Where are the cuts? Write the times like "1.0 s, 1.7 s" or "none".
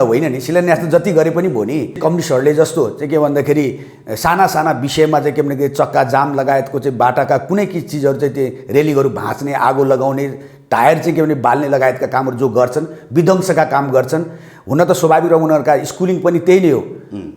2.0 s